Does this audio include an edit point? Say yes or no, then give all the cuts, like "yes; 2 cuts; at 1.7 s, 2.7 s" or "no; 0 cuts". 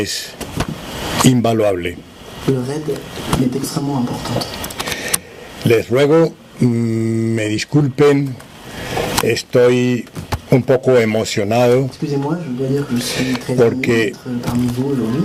no; 0 cuts